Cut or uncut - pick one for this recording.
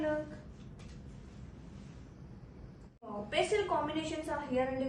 cut